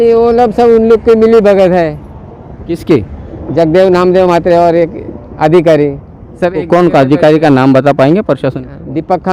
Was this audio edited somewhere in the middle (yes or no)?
no